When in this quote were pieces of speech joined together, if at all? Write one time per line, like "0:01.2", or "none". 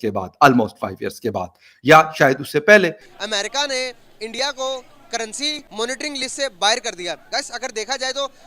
0:03.0